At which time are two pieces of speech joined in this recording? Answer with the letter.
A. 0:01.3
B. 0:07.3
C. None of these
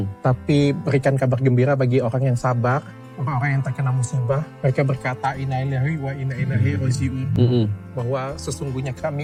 C